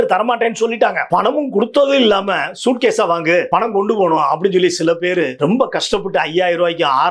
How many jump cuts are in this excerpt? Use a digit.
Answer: 3